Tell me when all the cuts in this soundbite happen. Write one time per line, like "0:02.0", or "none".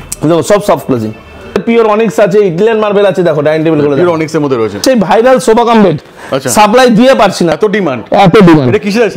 0:01.6
0:04.8
0:07.5